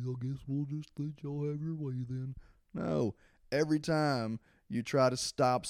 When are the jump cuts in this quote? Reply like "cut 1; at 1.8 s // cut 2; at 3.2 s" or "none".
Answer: none